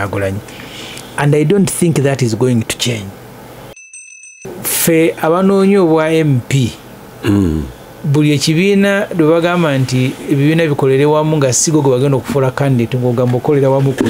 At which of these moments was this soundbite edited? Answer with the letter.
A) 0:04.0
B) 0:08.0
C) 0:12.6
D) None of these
A